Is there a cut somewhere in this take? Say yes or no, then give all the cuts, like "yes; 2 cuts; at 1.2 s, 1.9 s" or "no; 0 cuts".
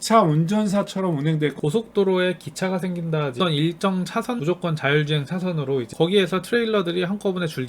yes; 4 cuts; at 1.6 s, 3.3 s, 4.4 s, 5.9 s